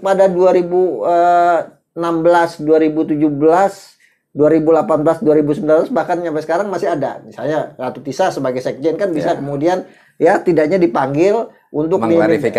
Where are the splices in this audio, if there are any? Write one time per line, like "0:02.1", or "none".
none